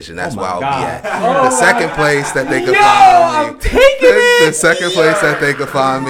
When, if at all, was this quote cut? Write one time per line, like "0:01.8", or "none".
none